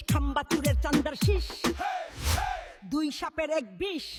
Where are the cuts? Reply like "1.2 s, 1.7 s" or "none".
none